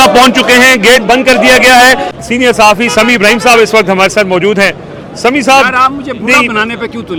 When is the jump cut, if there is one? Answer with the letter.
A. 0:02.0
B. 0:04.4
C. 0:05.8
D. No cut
D